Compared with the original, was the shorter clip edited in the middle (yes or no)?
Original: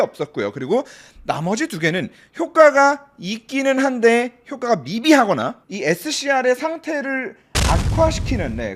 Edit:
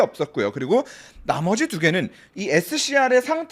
yes